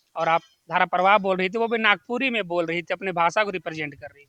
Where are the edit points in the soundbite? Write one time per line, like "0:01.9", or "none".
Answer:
none